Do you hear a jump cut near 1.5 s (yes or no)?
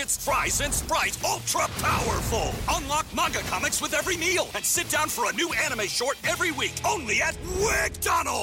no